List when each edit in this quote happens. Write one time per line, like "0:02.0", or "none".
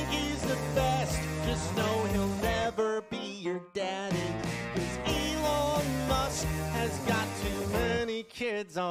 none